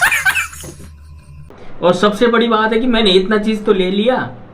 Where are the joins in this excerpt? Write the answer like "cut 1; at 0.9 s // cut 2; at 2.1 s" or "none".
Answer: cut 1; at 1.5 s